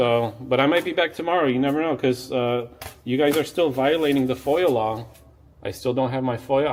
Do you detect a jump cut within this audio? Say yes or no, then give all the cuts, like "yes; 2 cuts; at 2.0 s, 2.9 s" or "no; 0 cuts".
no; 0 cuts